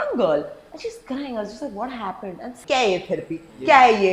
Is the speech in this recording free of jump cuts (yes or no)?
no